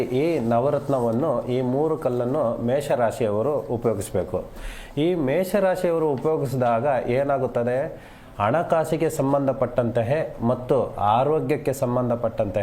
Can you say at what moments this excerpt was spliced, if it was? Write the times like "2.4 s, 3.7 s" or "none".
0.7 s, 2.0 s, 4.0 s